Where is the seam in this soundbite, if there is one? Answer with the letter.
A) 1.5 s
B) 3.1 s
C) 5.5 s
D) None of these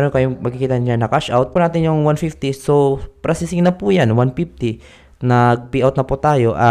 A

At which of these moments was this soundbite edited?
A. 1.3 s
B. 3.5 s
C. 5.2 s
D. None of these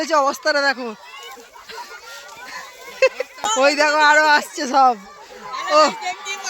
B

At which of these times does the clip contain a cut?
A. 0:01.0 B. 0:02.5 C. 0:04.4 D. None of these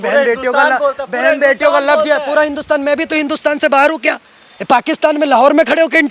D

